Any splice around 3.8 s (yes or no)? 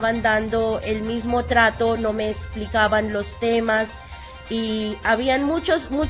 no